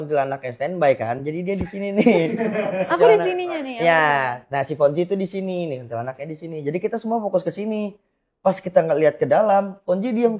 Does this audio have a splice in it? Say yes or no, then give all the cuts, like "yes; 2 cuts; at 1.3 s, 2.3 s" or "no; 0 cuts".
no; 0 cuts